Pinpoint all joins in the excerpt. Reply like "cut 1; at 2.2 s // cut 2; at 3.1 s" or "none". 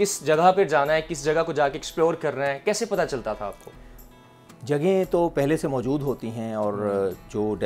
none